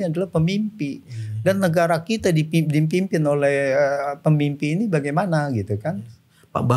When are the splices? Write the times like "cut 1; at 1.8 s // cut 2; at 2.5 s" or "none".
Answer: none